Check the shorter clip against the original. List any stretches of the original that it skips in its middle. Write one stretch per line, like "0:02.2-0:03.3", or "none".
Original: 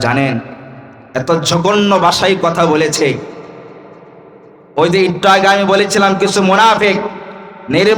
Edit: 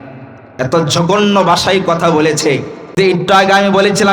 0:03.5-0:04.9

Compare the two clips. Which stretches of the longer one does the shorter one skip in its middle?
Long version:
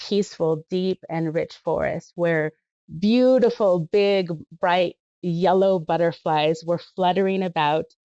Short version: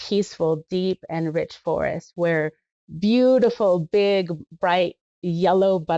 none

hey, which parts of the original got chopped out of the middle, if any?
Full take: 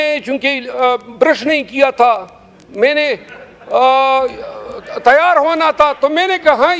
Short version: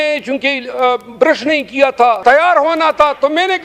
0:02.2-0:05.0

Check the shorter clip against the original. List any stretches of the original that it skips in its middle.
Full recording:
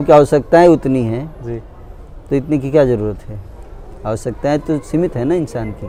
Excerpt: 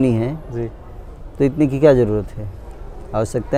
none

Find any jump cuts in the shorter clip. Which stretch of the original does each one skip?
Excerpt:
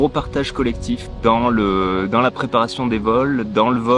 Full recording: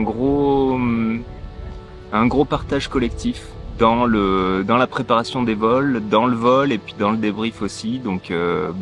0:03.4-0:03.6

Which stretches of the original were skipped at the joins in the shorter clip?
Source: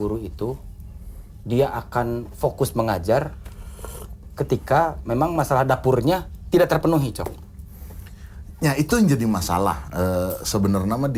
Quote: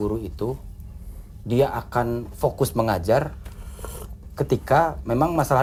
none

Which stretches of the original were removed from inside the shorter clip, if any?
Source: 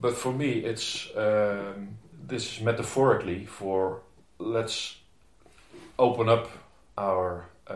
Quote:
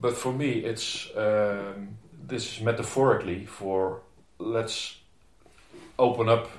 none

